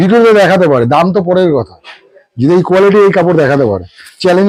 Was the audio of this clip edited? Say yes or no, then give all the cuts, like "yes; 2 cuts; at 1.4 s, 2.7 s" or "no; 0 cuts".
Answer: no; 0 cuts